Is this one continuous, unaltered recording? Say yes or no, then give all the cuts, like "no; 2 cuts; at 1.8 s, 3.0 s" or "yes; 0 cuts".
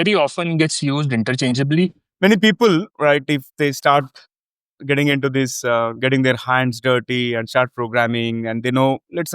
no; 1 cut; at 2.0 s